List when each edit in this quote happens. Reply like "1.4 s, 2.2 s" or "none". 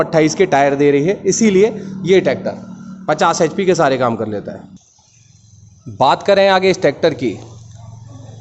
none